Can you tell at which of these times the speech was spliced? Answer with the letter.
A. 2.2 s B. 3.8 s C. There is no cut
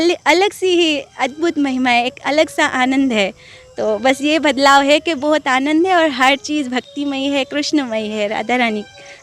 C